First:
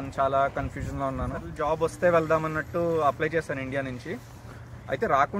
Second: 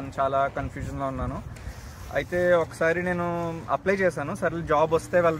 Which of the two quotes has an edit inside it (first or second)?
first